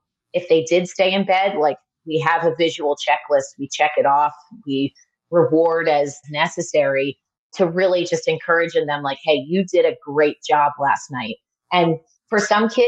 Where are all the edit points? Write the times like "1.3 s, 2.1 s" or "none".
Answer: 6.2 s